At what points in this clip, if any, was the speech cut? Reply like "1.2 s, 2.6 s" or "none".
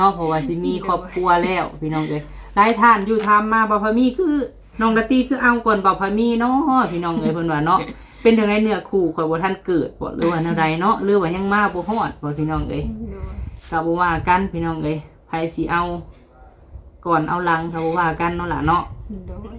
none